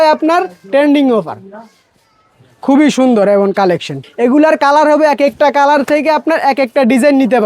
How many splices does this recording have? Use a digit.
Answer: 1